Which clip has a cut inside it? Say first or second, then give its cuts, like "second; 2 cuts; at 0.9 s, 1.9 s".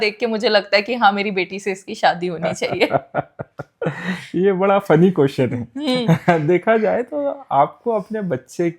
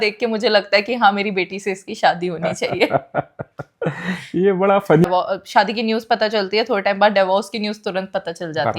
second; 1 cut; at 5.0 s